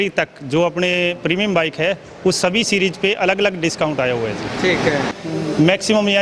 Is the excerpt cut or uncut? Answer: cut